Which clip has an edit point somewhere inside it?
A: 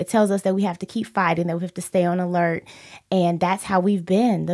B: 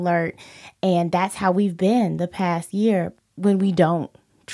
B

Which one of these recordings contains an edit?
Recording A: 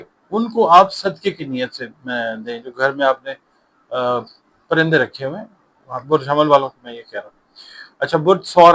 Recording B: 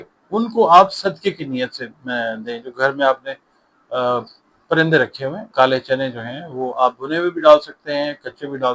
B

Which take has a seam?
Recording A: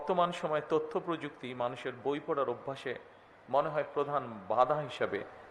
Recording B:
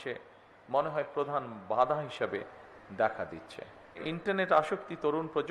B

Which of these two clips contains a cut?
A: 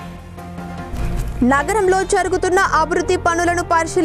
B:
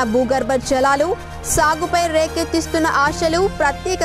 A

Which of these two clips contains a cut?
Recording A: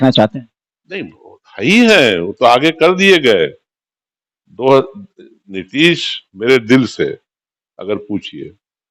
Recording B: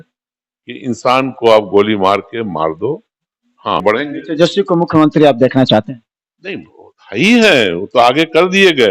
B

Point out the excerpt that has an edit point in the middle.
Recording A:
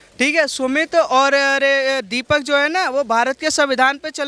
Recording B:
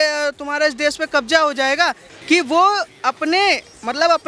B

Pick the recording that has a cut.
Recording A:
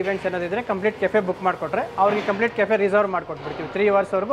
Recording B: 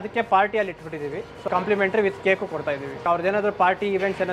B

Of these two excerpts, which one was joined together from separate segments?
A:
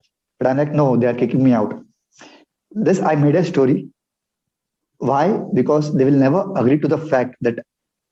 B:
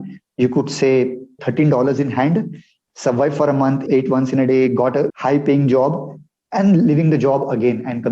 B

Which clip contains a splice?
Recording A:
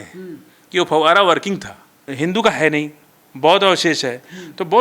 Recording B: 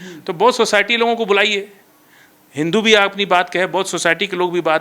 A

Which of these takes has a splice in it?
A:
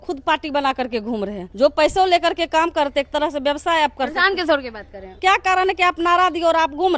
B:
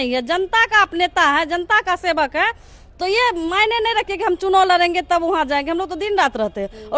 A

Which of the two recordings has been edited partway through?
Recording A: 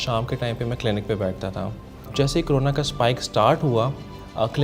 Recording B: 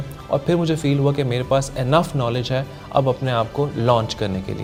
A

